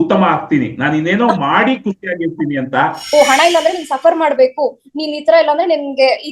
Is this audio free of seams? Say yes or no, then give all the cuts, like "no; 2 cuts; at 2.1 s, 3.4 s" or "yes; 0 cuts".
no; 1 cut; at 3.0 s